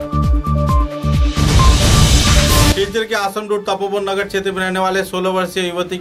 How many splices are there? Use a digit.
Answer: 1